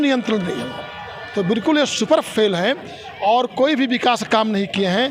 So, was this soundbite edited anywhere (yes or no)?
no